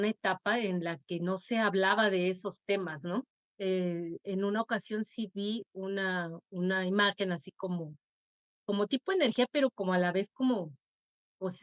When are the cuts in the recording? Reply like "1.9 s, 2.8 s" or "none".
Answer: 3.4 s